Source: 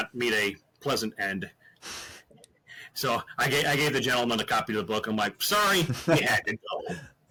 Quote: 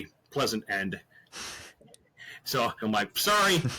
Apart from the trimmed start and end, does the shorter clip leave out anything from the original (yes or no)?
yes